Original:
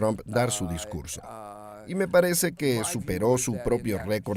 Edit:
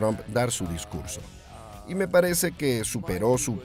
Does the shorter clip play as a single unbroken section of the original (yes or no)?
yes